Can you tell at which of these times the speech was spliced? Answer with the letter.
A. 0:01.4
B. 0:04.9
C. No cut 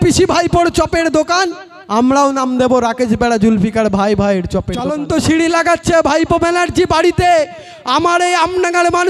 B